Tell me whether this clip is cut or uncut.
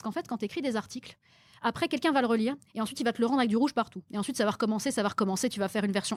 uncut